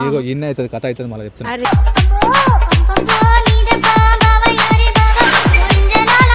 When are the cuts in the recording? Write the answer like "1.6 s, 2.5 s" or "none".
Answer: none